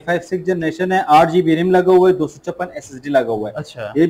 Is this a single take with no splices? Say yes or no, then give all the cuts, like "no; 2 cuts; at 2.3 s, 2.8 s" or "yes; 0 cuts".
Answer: yes; 0 cuts